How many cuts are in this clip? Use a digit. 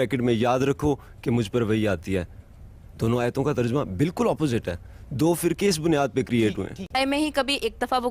1